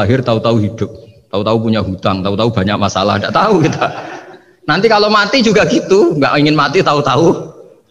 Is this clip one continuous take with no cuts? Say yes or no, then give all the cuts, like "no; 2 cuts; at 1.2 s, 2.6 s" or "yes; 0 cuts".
yes; 0 cuts